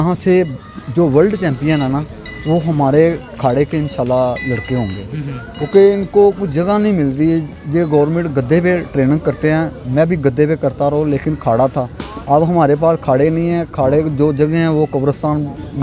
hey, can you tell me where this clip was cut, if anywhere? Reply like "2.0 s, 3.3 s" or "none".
none